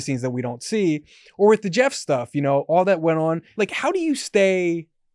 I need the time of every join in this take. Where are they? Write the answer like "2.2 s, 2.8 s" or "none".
3.5 s